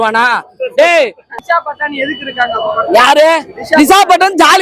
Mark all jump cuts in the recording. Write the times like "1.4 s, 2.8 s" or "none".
1.2 s